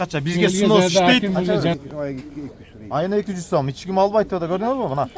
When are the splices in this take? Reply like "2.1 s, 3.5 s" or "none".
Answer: 1.8 s

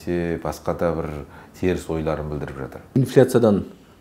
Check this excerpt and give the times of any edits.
3.0 s

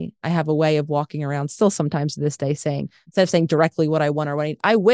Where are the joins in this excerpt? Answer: 3.0 s

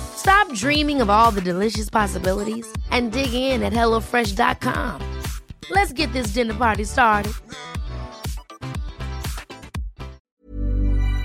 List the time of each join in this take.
10.2 s

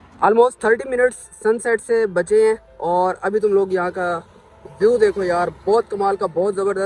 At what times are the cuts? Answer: none

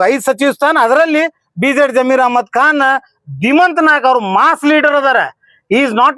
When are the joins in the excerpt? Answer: none

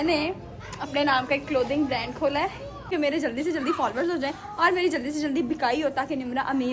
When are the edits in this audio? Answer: 2.9 s

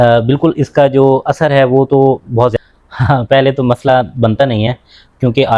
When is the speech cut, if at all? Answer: 2.5 s

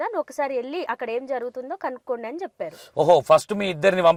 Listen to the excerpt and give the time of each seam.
none

